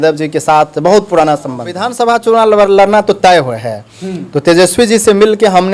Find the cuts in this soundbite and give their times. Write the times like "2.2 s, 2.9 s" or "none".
1.9 s